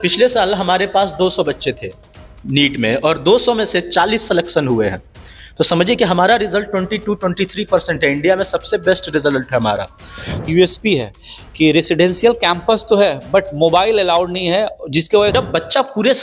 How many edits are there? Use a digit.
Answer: 2